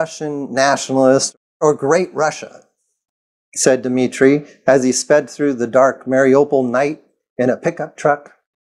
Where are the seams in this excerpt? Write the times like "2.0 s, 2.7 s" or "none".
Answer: 1.3 s

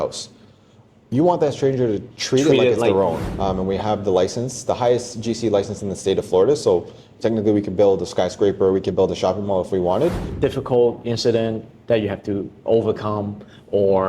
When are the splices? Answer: 3.3 s, 10.3 s

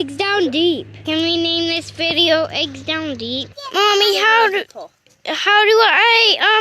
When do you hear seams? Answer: 1.1 s, 3.5 s

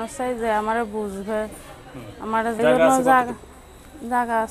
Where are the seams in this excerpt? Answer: 2.6 s

